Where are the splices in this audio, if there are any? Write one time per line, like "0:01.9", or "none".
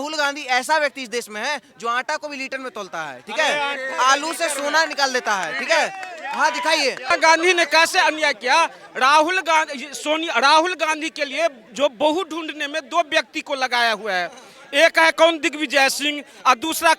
0:07.1